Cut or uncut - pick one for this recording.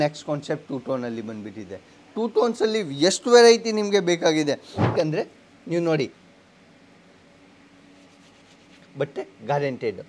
cut